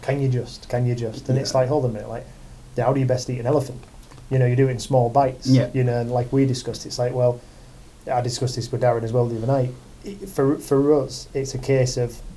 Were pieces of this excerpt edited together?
no; 0 cuts

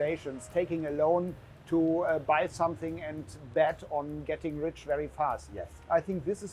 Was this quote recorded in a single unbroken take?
yes; 0 cuts

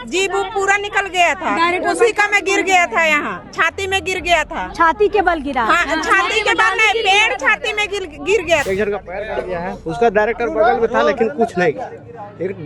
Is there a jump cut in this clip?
yes; 1 cut; at 8.6 s

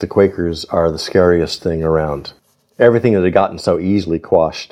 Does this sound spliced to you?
yes; 1 cut; at 2.2 s

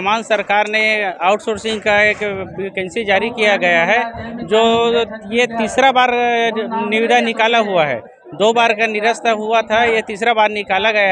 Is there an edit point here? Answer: no; 0 cuts

